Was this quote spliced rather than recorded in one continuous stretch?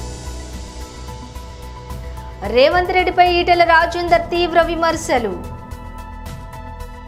no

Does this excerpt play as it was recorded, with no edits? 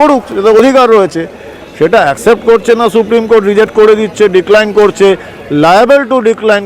yes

